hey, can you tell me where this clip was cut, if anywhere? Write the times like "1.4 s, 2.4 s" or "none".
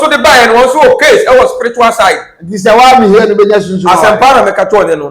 none